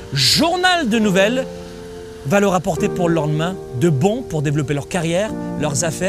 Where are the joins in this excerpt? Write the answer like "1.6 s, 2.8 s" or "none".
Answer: none